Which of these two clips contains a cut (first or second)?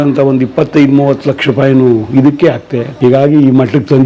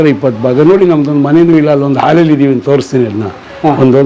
first